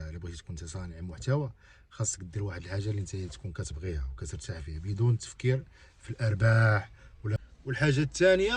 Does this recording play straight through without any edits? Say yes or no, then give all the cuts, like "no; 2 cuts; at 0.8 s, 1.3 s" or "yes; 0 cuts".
no; 1 cut; at 7.3 s